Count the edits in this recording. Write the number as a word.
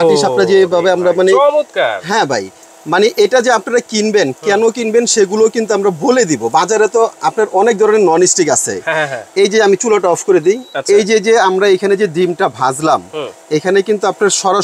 zero